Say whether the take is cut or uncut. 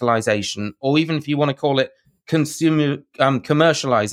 uncut